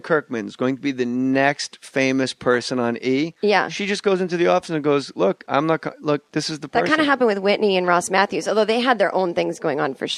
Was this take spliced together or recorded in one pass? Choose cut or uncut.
cut